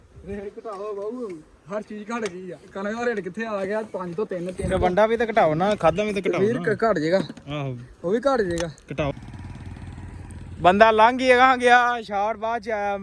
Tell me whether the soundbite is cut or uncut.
cut